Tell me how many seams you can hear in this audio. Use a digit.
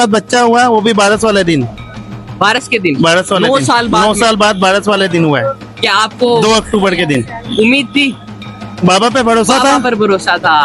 0